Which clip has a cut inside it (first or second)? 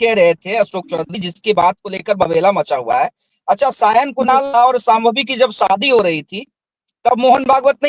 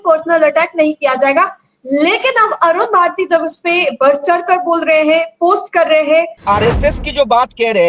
second